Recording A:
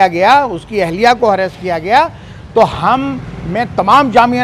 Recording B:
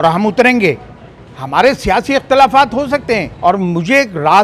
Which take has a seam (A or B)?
B